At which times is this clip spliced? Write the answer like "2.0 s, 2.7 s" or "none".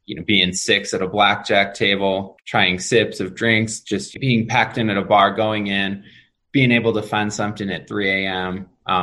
none